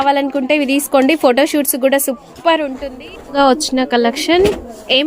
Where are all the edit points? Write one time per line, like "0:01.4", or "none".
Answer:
0:03.2